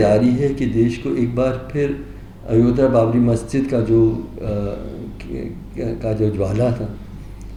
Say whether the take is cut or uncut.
uncut